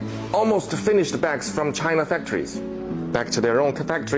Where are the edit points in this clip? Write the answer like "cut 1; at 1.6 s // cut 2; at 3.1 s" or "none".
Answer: none